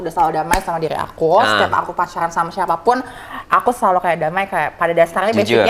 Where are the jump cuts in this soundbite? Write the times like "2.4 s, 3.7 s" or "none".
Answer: none